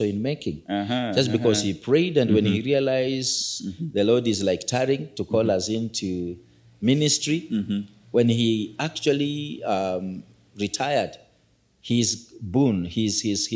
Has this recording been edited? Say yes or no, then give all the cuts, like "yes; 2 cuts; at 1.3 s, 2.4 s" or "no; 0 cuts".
no; 0 cuts